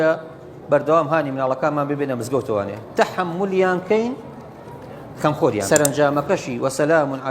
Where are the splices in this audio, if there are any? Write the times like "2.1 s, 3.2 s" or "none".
5.6 s